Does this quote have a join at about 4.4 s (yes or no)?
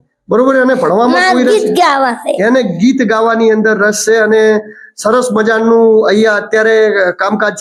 no